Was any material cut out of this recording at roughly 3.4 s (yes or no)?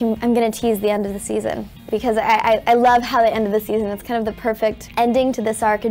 no